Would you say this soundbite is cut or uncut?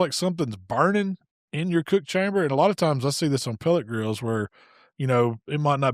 uncut